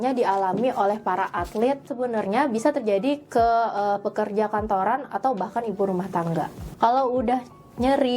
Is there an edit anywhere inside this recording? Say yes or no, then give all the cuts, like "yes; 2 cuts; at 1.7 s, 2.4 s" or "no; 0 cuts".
yes; 2 cuts; at 1.9 s, 6.7 s